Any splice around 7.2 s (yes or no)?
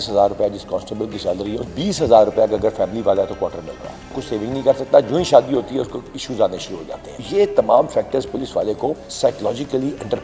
yes